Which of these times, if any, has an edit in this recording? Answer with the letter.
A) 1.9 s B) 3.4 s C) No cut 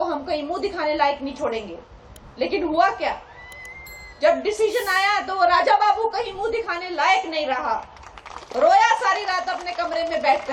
C